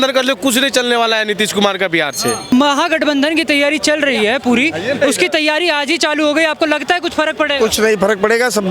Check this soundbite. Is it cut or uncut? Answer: cut